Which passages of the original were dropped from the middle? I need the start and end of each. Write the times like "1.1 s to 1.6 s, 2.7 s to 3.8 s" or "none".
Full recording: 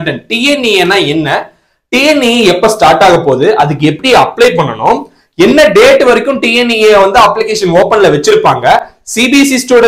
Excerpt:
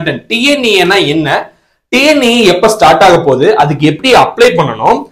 none

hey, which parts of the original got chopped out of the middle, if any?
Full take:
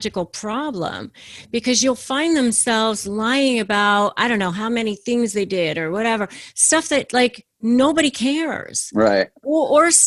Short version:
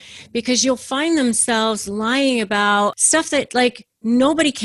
4.1 s to 6.5 s

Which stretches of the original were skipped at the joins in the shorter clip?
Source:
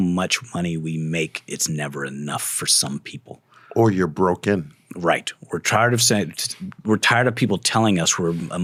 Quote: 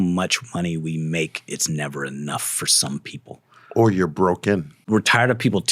4.7 s to 6.7 s

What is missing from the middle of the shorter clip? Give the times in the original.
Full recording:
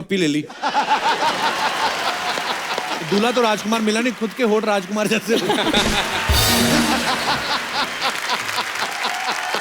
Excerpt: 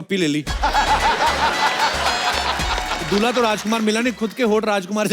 none

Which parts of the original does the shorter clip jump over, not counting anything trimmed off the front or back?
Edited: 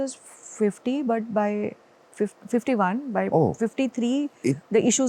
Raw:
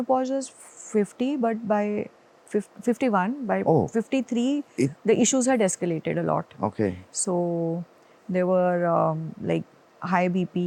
none

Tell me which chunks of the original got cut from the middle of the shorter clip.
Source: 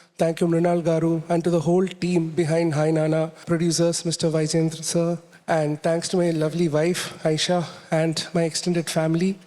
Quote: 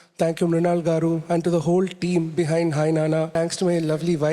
3.3 s to 5.8 s

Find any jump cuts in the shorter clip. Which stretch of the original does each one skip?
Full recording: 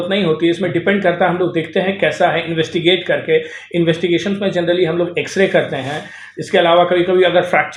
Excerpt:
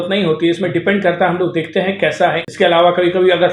2.5 s to 6.4 s

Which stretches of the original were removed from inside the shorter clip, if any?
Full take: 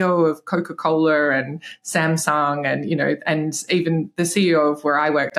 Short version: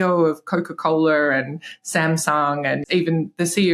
2.8 s to 3.6 s

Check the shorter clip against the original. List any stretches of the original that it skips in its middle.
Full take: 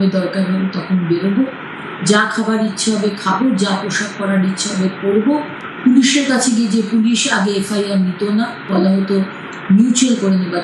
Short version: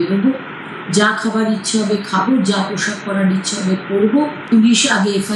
5.6 s to 6.9 s

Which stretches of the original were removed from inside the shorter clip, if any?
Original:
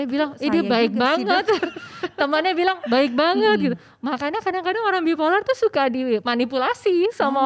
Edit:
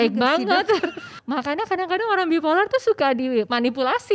1.9 s to 3.9 s

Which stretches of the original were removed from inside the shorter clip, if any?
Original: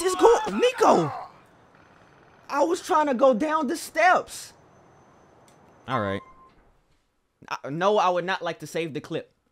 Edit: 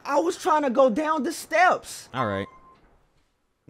4.4 s to 5.7 s

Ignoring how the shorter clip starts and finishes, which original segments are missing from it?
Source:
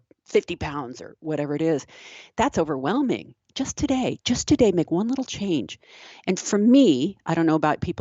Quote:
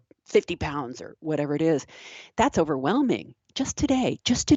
none

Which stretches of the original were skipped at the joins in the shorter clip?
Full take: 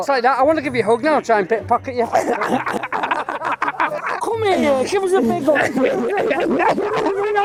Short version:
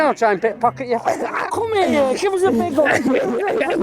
2.4 s to 4.0 s

